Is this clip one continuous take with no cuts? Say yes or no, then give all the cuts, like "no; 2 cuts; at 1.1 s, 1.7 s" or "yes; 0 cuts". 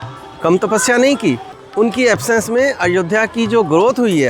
no; 1 cut; at 1.5 s